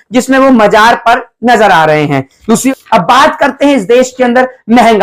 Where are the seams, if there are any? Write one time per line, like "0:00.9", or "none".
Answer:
0:02.7